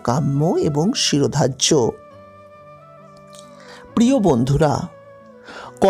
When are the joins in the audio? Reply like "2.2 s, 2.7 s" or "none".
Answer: 2.3 s, 3.9 s

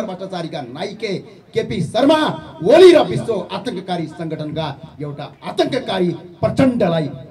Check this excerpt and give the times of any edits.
none

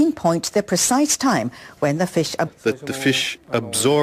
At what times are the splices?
none

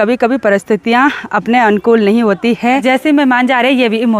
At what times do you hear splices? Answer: 2.8 s

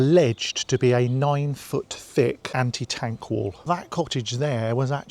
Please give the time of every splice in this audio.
2.4 s, 3.6 s

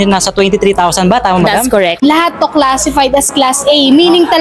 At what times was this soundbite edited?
2.0 s

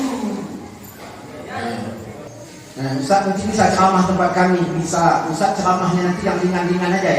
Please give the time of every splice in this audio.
2.3 s

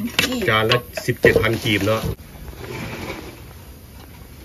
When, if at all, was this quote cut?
none

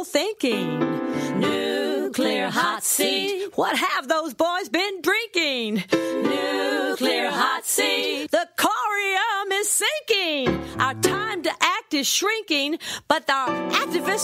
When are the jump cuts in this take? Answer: none

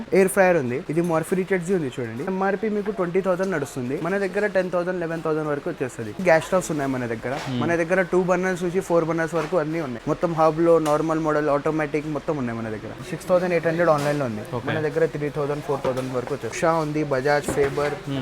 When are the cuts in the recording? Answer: 0.8 s, 2.3 s, 4.0 s, 6.2 s, 9.9 s, 13.0 s, 16.6 s

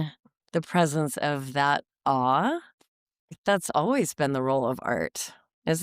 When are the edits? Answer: 3.3 s

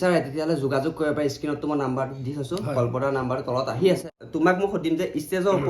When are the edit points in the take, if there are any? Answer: 4.1 s

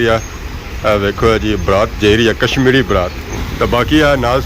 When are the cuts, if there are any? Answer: 3.3 s

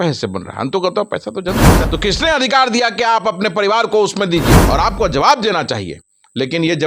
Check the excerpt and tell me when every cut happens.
1.8 s, 4.6 s

